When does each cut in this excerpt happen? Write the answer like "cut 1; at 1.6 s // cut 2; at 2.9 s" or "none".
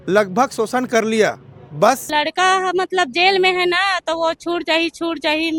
cut 1; at 2.1 s